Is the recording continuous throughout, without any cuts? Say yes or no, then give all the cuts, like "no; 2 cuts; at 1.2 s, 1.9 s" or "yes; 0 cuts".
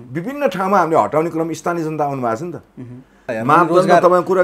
no; 1 cut; at 3.3 s